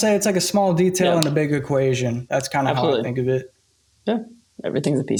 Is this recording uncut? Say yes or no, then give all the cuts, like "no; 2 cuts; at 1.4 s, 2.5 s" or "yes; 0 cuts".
yes; 0 cuts